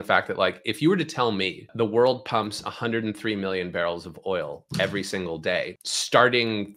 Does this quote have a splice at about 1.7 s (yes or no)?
yes